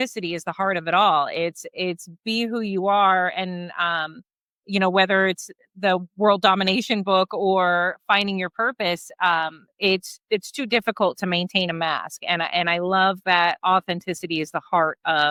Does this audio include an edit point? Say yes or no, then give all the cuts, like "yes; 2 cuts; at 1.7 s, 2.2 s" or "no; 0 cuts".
no; 0 cuts